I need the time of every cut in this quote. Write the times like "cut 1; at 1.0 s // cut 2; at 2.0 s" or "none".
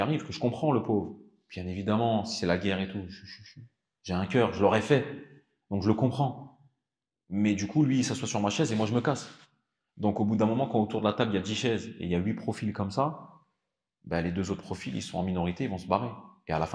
none